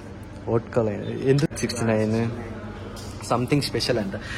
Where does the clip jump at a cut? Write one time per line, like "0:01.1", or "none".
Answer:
0:01.5